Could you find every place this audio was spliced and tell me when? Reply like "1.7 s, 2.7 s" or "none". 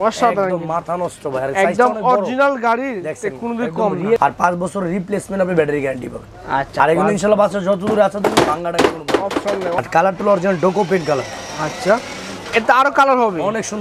4.2 s, 9.7 s